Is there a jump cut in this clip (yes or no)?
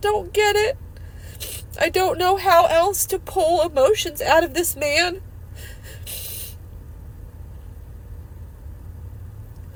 no